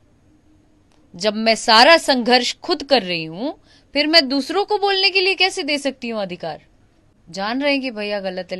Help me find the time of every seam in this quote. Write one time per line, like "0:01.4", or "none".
0:07.2